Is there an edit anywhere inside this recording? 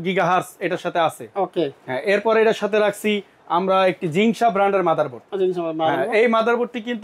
no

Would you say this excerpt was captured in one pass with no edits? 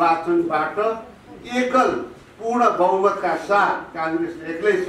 yes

